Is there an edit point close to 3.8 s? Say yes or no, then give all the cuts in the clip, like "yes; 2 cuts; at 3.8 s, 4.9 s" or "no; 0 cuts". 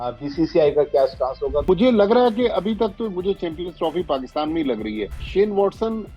no; 2 cuts; at 1.7 s, 5.2 s